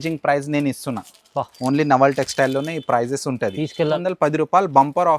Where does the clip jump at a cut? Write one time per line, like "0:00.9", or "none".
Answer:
0:04.0